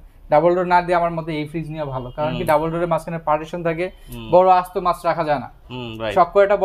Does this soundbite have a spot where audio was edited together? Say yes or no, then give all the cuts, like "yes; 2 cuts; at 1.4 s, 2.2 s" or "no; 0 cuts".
no; 0 cuts